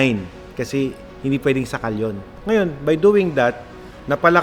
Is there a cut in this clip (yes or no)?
yes